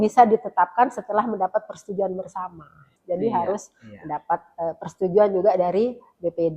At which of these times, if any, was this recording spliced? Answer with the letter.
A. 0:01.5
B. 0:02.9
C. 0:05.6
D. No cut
B